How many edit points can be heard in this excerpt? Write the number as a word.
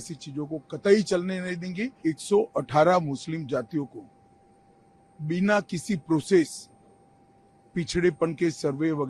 one